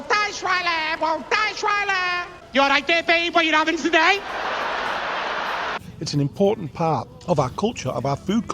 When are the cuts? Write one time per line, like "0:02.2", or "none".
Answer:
0:02.4
0:05.8
0:07.1